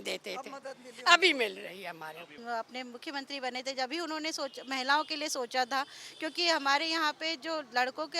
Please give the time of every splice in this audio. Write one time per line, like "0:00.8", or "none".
0:02.3